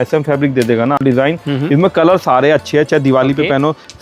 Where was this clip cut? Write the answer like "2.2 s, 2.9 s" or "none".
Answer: 1.0 s